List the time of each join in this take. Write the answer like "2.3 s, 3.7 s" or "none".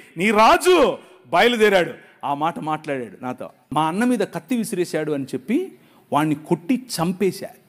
3.5 s